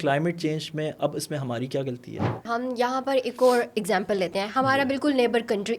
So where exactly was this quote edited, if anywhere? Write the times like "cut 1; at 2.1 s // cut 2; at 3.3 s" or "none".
cut 1; at 2.4 s